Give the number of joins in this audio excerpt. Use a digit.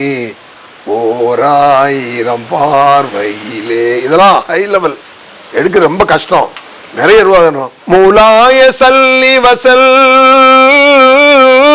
1